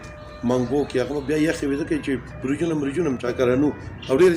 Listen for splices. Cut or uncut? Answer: cut